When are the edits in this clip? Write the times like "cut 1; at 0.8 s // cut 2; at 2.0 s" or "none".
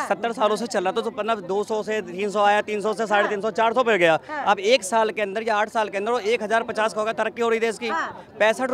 none

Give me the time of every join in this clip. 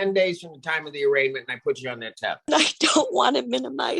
cut 1; at 2.5 s

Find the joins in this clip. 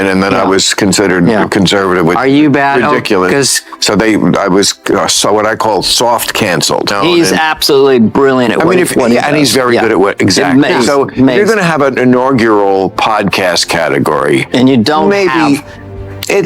cut 1; at 6.9 s

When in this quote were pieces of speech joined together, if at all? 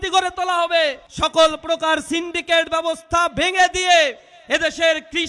cut 1; at 1.1 s

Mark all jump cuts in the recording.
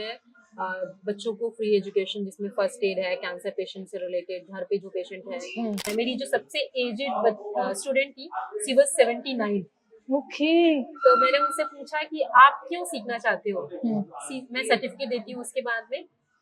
cut 1; at 5.9 s

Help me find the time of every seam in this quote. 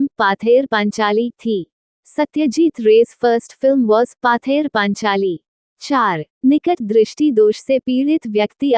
cut 1; at 5.9 s

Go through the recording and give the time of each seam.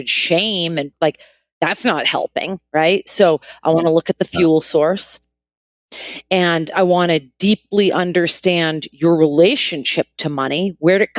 cut 1; at 0.9 s

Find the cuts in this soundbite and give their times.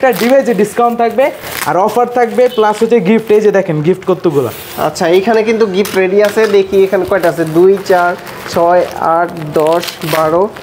none

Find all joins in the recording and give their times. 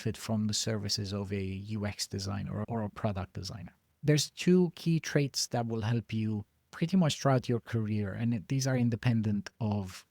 cut 1; at 4.0 s

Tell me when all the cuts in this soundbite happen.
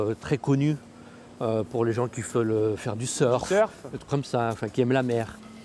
none

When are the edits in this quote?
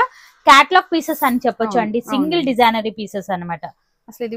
none

